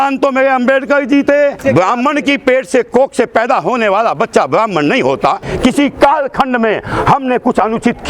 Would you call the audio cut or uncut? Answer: cut